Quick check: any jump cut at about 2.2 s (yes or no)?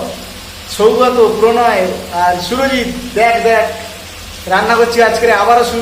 no